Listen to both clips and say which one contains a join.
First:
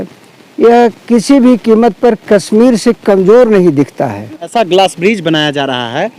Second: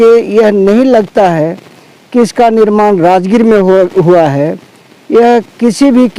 first; 1 cut; at 4.5 s

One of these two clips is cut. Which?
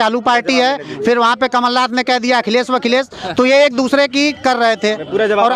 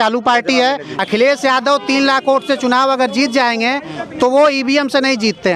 second; 1 cut; at 0.9 s

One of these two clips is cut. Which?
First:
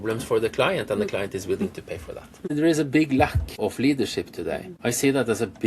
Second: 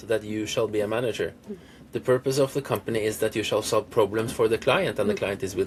first; 3 cuts; at 2.5 s, 3.5 s, 4.7 s

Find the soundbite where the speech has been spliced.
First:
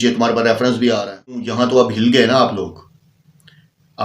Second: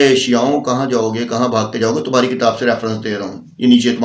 first; 1 cut; at 1.5 s

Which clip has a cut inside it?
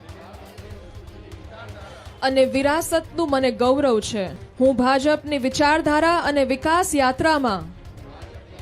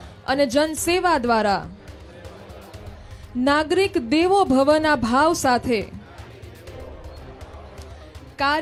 first; 1 cut; at 4.4 s

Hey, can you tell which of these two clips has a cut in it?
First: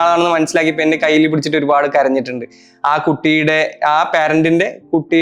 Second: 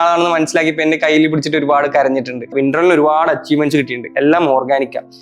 second; 1 cut; at 2.5 s

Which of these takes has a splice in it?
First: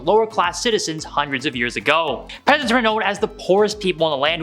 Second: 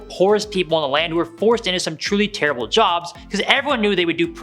first; 1 cut; at 2.3 s

